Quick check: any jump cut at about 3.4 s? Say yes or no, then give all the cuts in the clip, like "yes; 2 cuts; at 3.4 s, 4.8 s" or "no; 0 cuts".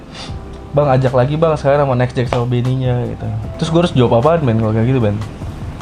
yes; 1 cut; at 3.4 s